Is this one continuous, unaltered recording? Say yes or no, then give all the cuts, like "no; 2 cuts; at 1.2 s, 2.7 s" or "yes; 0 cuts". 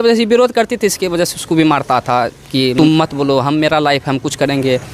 no; 1 cut; at 2.7 s